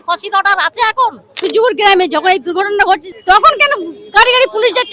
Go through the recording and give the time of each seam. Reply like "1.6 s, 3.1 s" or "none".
1.3 s, 3.1 s